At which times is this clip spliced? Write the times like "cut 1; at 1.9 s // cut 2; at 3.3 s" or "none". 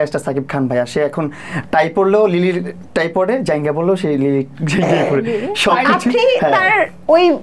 none